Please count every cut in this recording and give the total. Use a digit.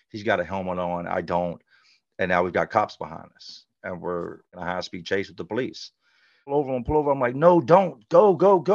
2